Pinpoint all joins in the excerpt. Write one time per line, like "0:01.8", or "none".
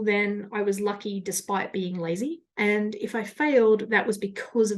0:02.5

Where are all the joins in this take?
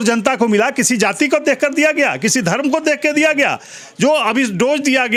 none

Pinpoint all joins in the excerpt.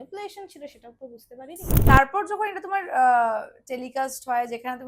0:01.8

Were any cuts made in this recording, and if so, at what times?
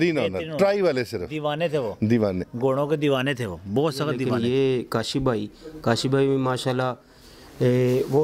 0:04.2

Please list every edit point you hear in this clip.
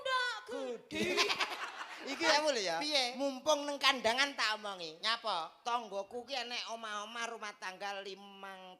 0:02.3

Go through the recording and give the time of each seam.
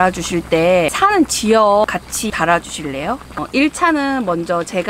0:00.9
0:01.9
0:03.4

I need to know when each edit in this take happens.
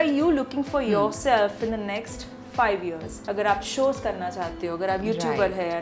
0:03.1

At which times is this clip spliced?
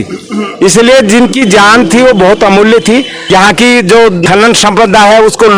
0:03.2

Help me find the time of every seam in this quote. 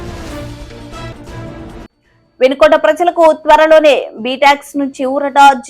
0:01.0

